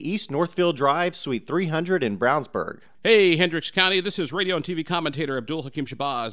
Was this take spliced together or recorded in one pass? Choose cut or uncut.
cut